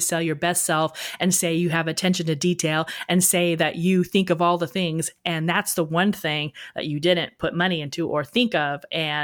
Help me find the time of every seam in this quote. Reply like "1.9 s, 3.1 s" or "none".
none